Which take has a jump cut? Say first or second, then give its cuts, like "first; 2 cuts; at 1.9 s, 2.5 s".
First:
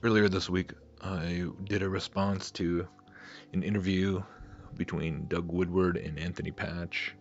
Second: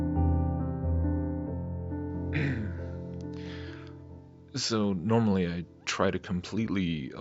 second; 1 cut; at 3.4 s